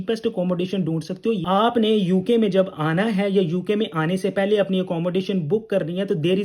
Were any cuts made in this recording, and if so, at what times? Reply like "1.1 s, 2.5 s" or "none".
1.4 s